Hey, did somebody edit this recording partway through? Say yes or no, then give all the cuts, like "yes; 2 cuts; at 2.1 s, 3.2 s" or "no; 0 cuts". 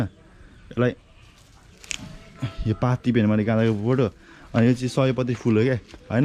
no; 0 cuts